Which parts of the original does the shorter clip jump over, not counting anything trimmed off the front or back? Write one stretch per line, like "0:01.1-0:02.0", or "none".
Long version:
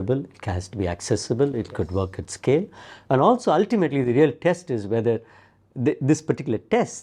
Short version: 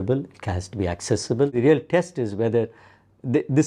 0:01.5-0:04.0